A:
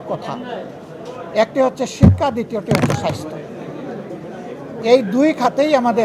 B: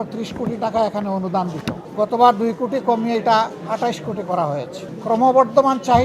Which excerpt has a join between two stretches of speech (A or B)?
B